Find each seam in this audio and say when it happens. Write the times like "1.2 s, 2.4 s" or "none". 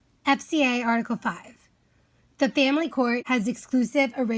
3.2 s